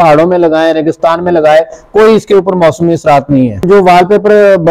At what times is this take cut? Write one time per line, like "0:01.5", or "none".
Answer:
0:03.7